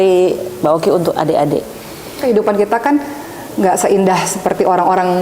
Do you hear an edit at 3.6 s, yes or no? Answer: no